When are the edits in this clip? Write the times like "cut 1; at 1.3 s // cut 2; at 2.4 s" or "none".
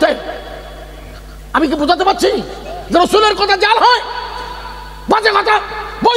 none